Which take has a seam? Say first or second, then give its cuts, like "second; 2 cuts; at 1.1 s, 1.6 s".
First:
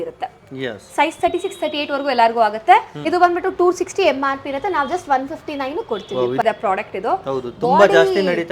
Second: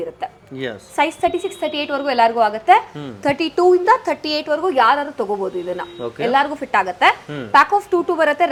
first; 2 cuts; at 3.0 s, 6.4 s